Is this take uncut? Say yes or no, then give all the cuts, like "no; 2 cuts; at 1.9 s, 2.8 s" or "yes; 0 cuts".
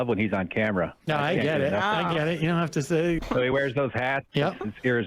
no; 2 cuts; at 3.2 s, 4.3 s